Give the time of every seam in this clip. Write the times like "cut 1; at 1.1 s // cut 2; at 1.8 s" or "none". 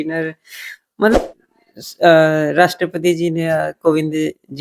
cut 1; at 1.2 s

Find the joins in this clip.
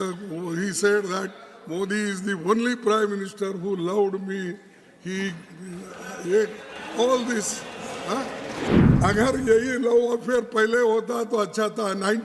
cut 1; at 8.8 s

